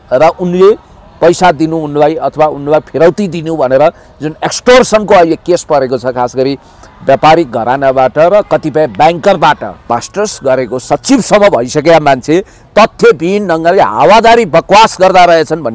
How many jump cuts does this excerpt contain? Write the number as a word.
one